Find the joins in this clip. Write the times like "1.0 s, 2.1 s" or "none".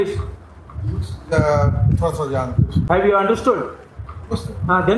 3.0 s

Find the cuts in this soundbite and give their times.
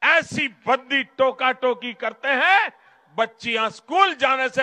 none

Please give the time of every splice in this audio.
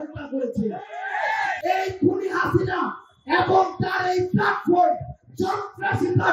1.5 s

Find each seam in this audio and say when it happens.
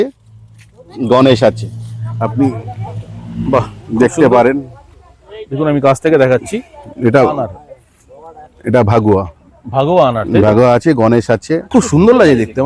11.6 s

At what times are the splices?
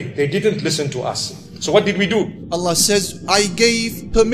2.4 s

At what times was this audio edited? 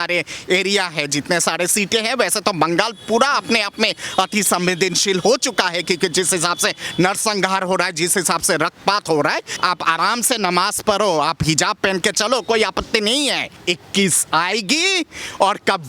9.6 s, 13.6 s

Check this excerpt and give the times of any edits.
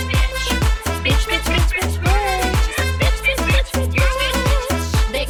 none

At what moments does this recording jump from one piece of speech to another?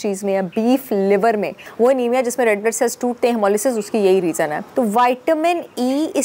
1.6 s, 4.6 s

